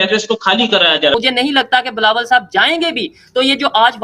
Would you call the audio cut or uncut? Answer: cut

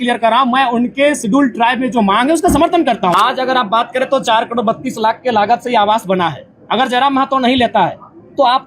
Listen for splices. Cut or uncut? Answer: cut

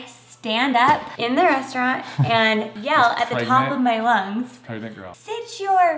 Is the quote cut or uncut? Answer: cut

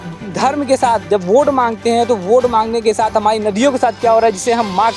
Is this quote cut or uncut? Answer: uncut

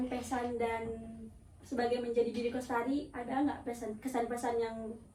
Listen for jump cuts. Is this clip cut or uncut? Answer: uncut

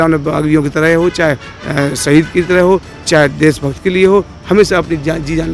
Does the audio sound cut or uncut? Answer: uncut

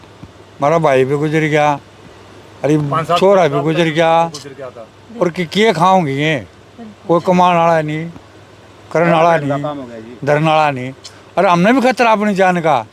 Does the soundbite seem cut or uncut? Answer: uncut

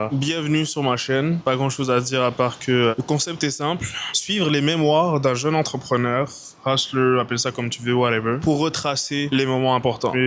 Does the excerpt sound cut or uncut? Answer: uncut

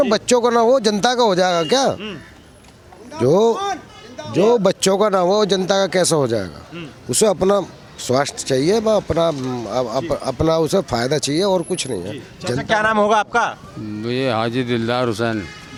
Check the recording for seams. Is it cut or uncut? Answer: uncut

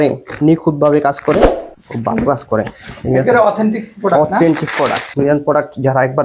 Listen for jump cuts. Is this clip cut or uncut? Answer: cut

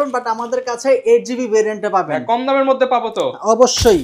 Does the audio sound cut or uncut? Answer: uncut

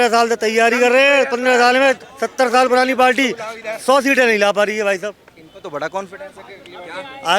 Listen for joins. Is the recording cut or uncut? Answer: uncut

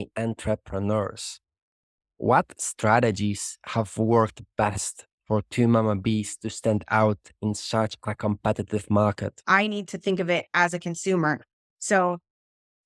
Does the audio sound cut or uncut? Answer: cut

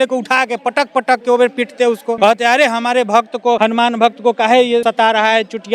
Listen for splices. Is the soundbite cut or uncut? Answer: cut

